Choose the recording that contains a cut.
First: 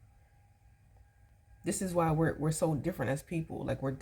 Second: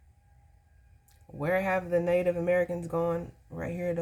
first; 1 cut; at 1.3 s

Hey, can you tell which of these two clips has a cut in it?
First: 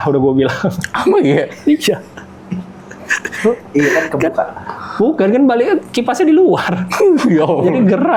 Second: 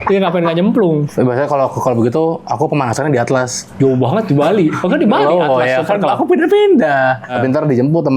second; 3 cuts; at 1.1 s, 3.6 s, 7.3 s

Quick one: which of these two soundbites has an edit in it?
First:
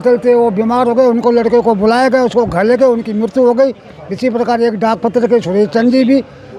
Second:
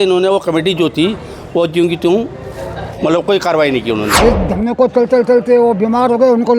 second; 1 cut; at 4.1 s

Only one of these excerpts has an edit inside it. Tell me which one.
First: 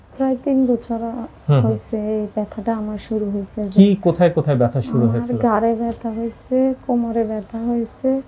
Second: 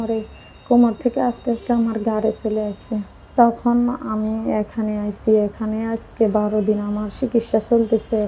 second; 1 cut; at 3.2 s

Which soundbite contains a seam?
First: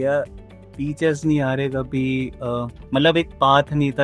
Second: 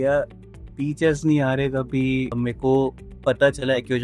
second; 2 cuts; at 2.3 s, 3.1 s

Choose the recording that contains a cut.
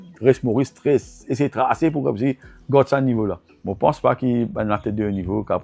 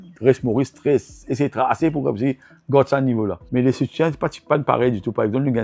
first; 1 cut; at 3.4 s

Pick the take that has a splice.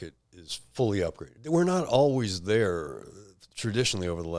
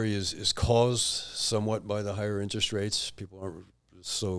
first; 1 cut; at 1.3 s

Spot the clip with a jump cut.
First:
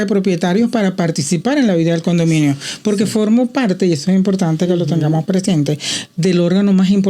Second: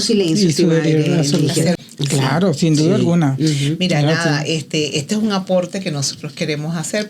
second; 1 cut; at 1.8 s

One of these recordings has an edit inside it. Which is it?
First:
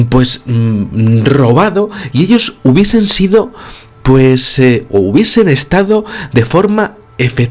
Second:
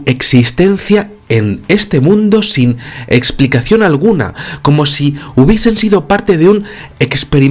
second; 1 cut; at 2.0 s

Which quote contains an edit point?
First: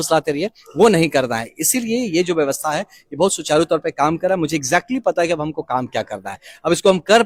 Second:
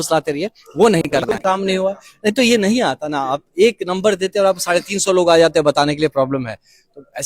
second; 1 cut; at 1.2 s

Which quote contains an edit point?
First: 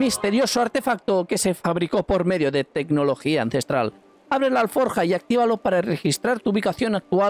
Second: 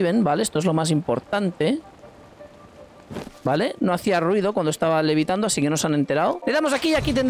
second; 1 cut; at 6.4 s

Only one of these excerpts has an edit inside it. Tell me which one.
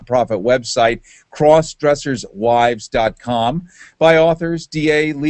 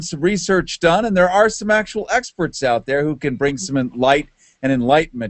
second; 1 cut; at 3.3 s

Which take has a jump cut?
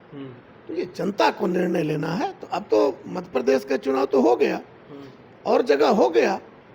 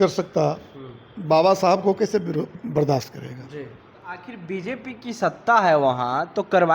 second; 1 cut; at 4.3 s

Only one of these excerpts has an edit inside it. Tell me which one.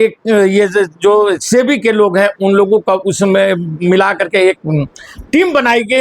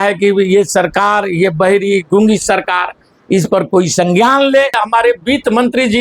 second; 1 cut; at 4.8 s

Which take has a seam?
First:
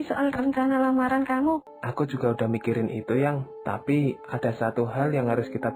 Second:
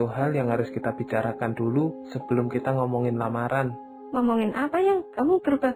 first; 1 cut; at 1.7 s

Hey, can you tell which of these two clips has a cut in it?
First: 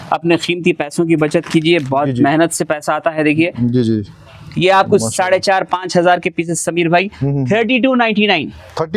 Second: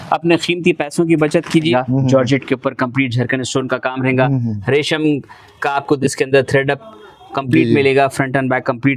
second; 1 cut; at 1.7 s

